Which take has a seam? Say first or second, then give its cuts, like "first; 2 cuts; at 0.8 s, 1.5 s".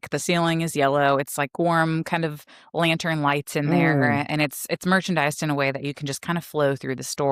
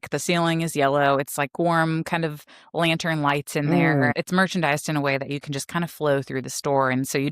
second; 1 cut; at 4.1 s